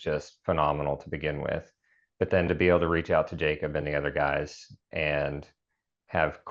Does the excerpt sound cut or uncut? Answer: uncut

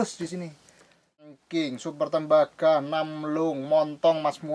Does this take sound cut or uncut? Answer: cut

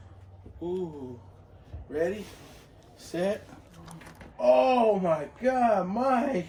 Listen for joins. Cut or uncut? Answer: uncut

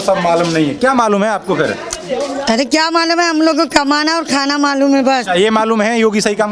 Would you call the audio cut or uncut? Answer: uncut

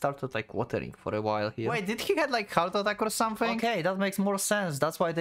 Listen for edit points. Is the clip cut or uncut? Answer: cut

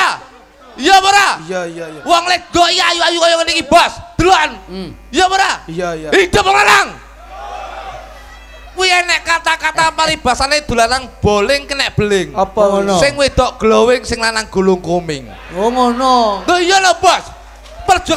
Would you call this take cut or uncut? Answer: uncut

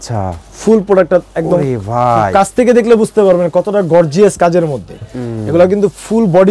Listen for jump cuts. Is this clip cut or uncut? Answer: uncut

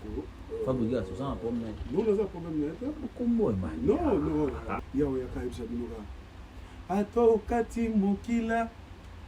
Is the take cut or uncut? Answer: cut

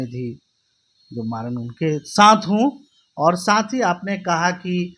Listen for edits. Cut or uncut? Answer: uncut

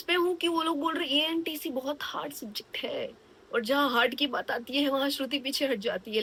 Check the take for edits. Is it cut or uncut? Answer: uncut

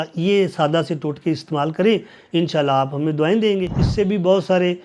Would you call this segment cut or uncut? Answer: cut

